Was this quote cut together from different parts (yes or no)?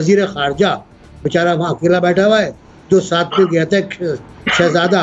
no